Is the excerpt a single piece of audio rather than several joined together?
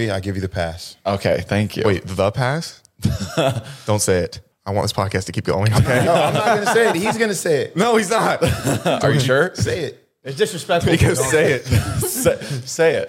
yes; 0 cuts

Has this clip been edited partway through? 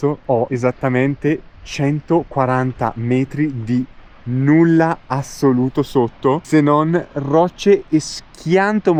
no; 0 cuts

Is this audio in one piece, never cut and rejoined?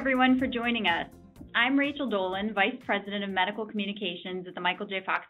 no; 1 cut; at 1.1 s

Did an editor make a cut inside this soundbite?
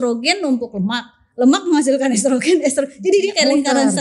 no; 0 cuts

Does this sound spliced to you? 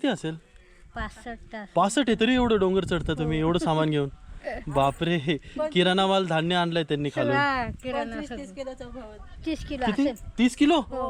no; 0 cuts

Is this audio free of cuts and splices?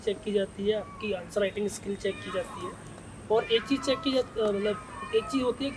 yes; 0 cuts

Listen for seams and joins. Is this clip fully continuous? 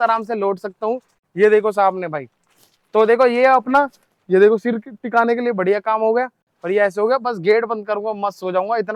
yes; 0 cuts

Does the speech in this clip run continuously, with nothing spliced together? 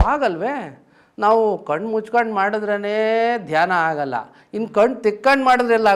yes; 0 cuts

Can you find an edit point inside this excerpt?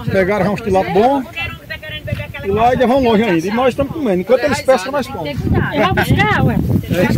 no; 0 cuts

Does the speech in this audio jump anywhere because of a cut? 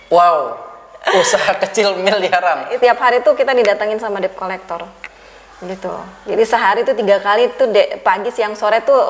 yes; 1 cut; at 2.7 s

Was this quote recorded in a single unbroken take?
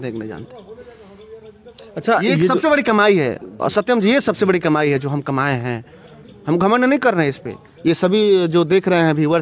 yes; 0 cuts

